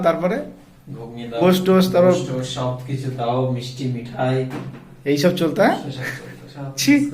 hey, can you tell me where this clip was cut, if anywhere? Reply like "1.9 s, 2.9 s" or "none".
1.4 s